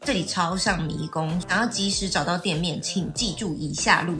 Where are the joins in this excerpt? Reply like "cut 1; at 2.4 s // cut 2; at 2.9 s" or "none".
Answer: cut 1; at 1.5 s

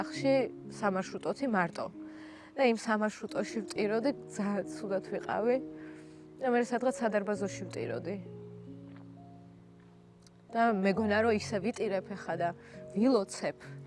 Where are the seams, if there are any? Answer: none

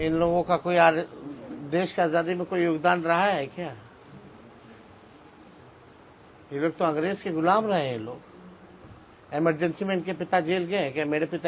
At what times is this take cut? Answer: none

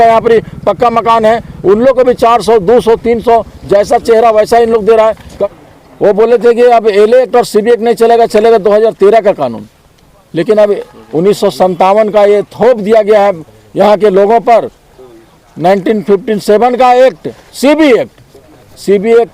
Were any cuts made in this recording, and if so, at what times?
cut 1; at 5.4 s

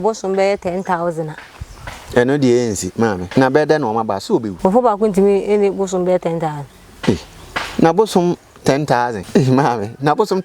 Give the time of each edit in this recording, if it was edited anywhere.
cut 1; at 3.2 s // cut 2; at 4.5 s // cut 3; at 9.2 s

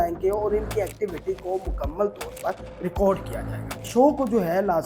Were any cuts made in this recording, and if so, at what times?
cut 1; at 3.8 s

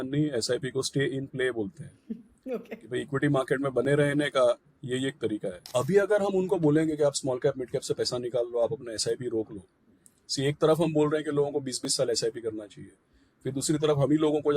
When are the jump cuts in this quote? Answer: cut 1; at 5.6 s

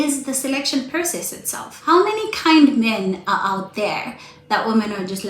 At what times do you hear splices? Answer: cut 1; at 1.9 s

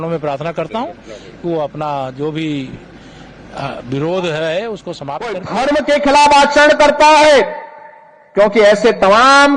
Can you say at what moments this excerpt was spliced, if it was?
cut 1; at 5.5 s

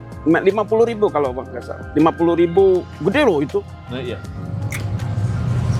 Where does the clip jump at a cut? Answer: none

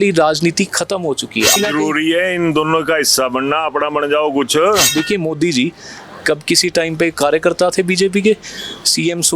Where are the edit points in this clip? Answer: cut 1; at 1.6 s // cut 2; at 4.9 s

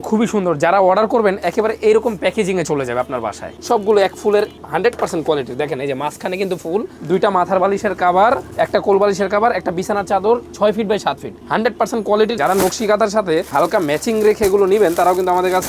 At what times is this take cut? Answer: cut 1; at 3.6 s // cut 2; at 12.3 s

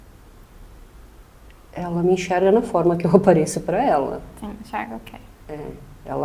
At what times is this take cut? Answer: none

